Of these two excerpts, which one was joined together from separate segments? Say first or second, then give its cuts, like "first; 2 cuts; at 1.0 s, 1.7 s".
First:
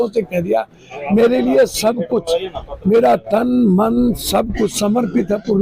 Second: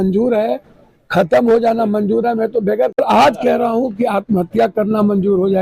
second; 1 cut; at 3.0 s